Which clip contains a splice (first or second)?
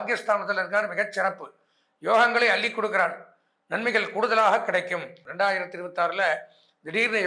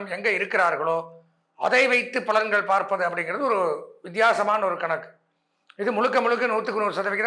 first